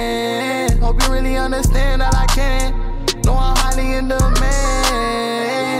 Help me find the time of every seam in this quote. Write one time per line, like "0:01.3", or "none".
none